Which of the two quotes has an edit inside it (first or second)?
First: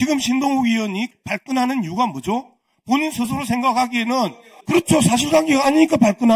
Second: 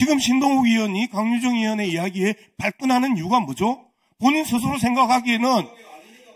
first